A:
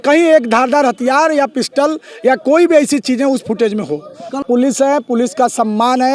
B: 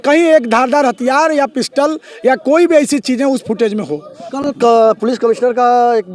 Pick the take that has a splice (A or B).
A